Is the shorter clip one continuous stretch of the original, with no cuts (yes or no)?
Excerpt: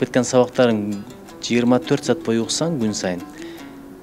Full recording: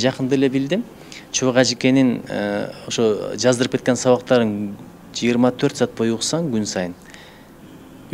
yes